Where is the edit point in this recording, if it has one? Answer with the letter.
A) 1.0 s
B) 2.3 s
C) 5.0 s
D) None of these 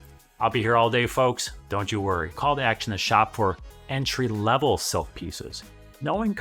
B